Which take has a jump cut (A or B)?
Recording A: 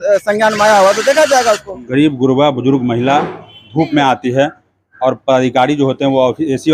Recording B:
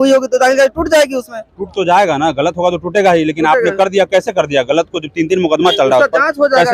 A